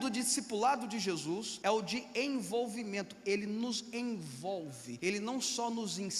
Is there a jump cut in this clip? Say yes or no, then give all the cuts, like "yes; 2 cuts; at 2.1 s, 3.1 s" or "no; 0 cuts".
yes; 2 cuts; at 1.5 s, 4.9 s